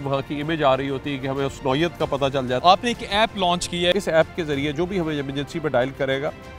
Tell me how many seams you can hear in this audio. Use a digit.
2